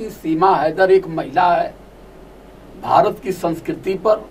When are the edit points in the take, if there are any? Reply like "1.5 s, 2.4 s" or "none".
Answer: none